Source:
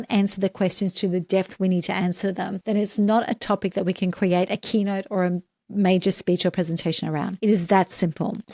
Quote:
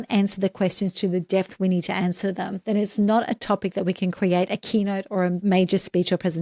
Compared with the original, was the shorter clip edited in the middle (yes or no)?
yes